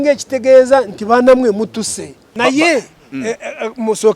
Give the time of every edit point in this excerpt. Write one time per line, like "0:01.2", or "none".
0:02.3